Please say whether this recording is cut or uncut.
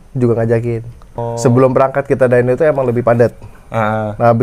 cut